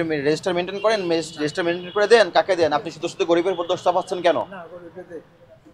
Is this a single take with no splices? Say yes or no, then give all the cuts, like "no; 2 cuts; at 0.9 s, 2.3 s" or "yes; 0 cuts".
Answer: yes; 0 cuts